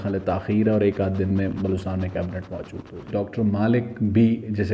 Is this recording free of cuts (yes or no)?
no